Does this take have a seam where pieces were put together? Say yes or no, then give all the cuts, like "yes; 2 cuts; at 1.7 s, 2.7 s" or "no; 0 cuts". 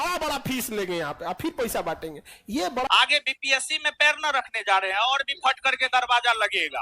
yes; 1 cut; at 2.9 s